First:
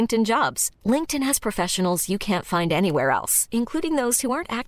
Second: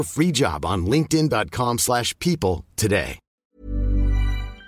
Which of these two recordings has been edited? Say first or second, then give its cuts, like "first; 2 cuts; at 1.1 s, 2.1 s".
second; 1 cut; at 3.2 s